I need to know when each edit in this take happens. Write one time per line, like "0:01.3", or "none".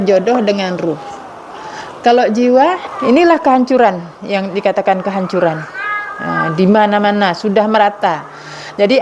0:02.9